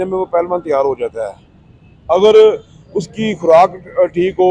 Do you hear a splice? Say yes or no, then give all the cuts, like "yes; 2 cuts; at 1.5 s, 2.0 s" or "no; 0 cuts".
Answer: no; 0 cuts